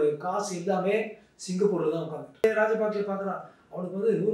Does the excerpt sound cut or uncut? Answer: cut